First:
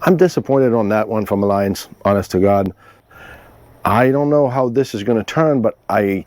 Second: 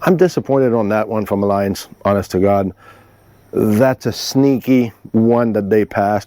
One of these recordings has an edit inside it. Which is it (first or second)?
first